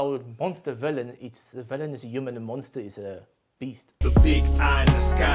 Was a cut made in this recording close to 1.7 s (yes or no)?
no